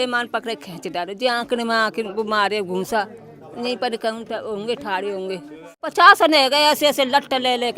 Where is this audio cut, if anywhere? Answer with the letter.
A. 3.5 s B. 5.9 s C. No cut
B